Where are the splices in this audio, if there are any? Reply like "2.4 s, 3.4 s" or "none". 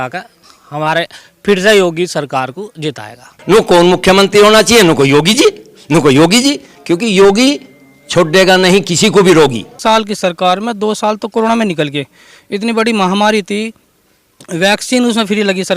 3.3 s, 9.8 s

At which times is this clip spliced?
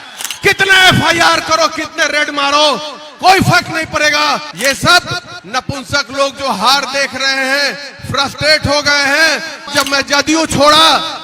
4.5 s, 9.7 s

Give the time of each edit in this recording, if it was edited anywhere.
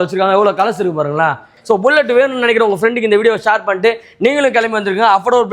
1.5 s

